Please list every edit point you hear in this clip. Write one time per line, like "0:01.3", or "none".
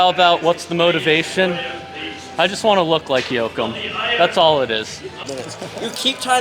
0:05.3